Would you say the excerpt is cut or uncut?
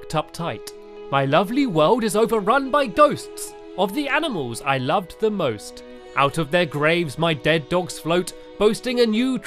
cut